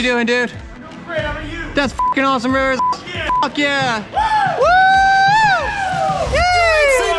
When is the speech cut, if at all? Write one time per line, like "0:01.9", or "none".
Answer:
none